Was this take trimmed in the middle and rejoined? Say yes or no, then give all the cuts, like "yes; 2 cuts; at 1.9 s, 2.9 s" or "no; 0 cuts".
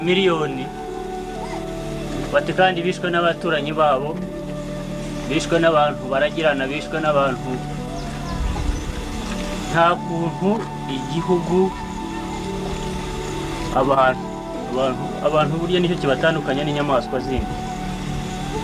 no; 0 cuts